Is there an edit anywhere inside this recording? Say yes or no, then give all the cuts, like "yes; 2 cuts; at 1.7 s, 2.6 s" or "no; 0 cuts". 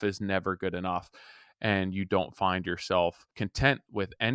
yes; 1 cut; at 3.4 s